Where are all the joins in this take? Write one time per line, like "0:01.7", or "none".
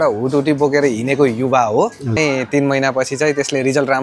0:02.2